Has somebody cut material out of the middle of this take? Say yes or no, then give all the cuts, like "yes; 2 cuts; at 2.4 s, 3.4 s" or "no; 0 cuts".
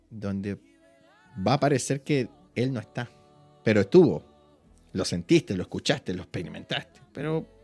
no; 0 cuts